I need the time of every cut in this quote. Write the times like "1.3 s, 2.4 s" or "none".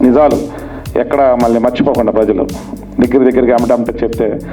none